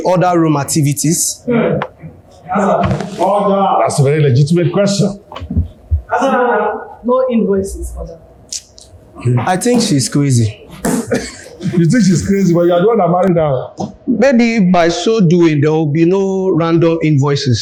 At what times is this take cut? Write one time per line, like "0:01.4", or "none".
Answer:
none